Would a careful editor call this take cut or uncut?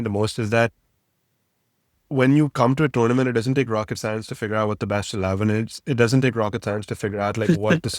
uncut